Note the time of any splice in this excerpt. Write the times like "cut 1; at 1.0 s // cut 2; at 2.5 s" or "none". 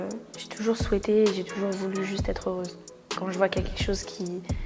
cut 1; at 3.1 s